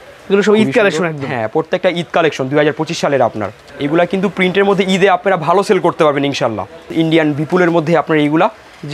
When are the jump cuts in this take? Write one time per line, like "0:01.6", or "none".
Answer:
0:03.6
0:06.8